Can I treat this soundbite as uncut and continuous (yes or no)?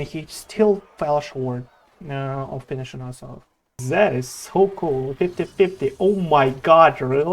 no